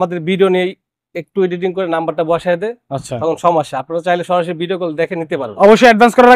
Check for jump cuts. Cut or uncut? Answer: uncut